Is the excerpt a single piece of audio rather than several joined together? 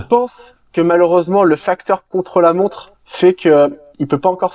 yes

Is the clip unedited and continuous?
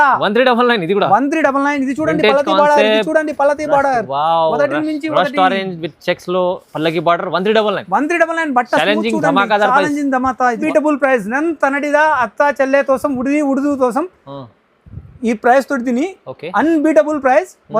no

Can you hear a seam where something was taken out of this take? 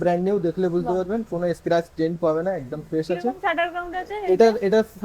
no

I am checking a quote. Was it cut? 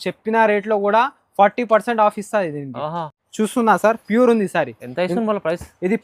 no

